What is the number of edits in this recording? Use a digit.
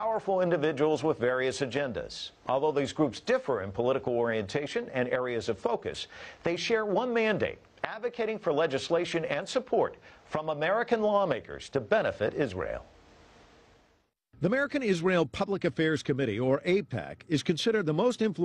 1